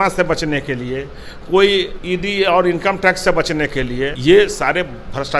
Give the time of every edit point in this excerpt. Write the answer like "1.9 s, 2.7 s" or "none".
2.0 s, 4.2 s